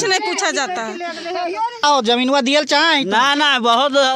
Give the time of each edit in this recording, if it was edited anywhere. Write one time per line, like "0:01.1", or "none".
0:01.8